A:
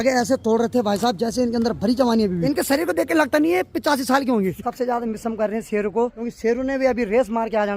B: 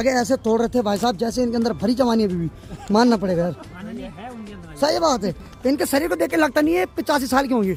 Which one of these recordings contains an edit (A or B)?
A